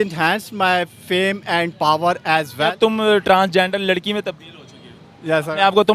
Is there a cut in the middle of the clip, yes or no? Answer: yes